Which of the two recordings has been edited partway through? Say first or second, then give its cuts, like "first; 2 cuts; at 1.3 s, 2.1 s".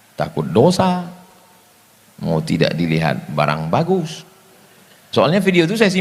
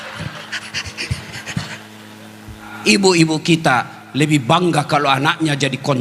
second; 1 cut; at 2.7 s